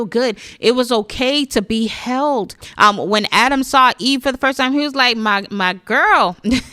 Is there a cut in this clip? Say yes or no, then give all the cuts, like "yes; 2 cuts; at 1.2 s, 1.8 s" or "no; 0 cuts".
yes; 1 cut; at 2.6 s